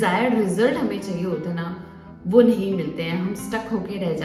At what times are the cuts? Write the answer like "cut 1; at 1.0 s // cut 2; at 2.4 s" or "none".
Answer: none